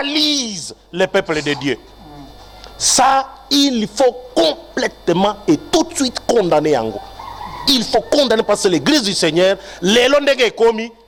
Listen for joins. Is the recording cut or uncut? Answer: uncut